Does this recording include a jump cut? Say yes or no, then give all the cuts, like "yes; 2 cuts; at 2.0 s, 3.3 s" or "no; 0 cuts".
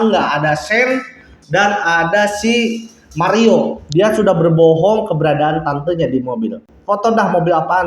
no; 0 cuts